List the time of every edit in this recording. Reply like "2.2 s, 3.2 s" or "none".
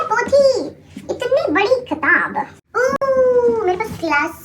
2.6 s